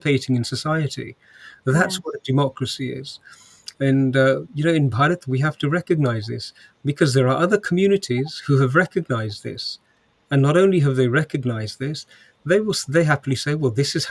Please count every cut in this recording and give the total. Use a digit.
0